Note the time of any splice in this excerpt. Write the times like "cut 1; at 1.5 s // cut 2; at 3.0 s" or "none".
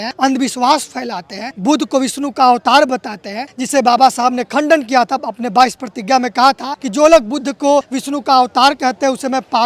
none